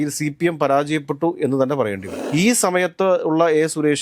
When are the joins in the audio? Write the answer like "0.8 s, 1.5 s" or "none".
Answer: 2.1 s